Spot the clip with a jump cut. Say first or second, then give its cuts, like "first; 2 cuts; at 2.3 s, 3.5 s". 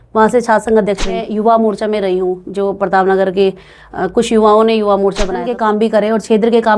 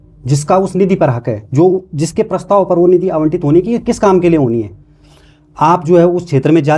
first; 2 cuts; at 1.3 s, 5.5 s